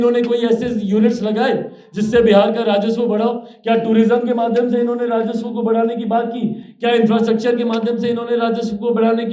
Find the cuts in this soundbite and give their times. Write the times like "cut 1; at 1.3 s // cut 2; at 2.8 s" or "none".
none

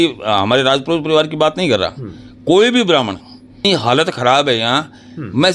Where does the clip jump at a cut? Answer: cut 1; at 3.7 s

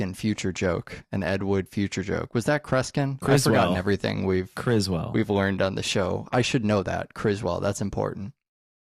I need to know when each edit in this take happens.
none

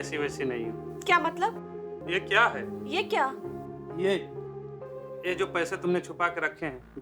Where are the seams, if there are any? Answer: cut 1; at 2.0 s

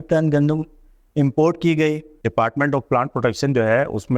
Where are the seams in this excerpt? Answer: cut 1; at 2.2 s

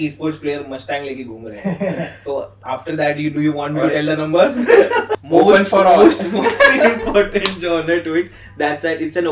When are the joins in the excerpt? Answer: cut 1; at 5.1 s

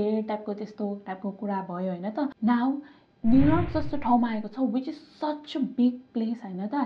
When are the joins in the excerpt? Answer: cut 1; at 2.3 s

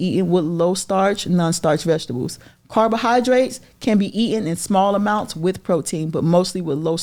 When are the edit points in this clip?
none

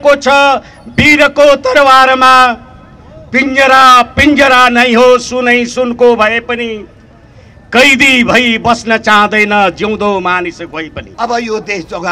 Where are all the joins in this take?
cut 1; at 11.0 s

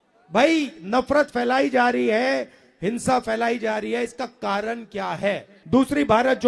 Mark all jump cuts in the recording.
cut 1; at 5.5 s

